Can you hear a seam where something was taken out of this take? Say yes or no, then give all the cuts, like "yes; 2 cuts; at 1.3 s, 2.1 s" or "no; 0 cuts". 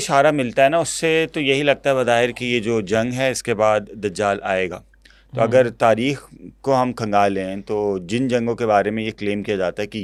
no; 0 cuts